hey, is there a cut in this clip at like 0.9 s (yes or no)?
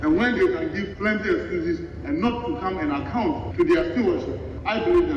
yes